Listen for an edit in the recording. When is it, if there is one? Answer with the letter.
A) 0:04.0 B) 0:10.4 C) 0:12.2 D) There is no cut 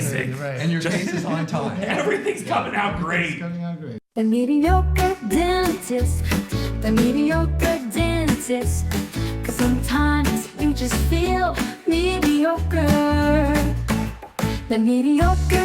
A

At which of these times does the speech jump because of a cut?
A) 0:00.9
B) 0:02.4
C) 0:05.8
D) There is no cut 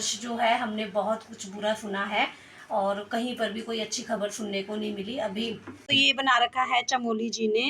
C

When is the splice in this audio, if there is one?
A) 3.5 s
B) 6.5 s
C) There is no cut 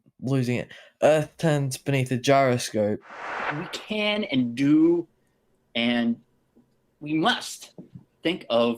A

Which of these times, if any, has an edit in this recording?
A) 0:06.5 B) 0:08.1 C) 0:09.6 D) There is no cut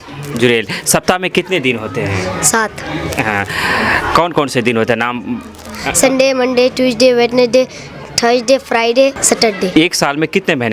C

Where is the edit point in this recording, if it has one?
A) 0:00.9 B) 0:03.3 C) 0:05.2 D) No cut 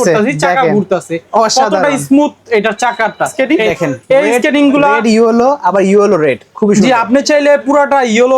B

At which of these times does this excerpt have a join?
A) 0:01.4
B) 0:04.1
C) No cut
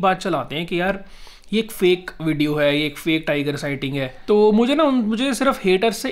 B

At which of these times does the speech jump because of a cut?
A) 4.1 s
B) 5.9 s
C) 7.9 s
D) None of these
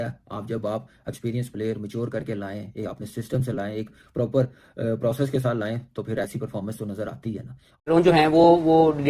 C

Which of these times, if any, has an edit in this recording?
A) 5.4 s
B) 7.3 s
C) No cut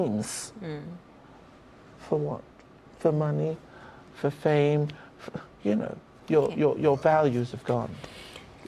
C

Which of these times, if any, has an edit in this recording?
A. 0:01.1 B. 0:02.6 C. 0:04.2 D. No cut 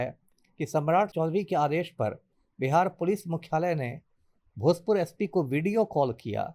A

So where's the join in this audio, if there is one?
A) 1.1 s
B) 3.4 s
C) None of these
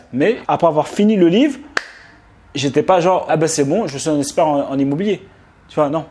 C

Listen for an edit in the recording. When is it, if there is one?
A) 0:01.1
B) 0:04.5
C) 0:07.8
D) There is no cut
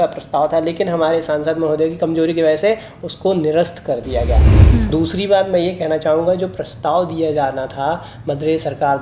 B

